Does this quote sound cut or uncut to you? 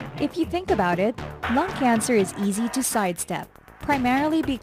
cut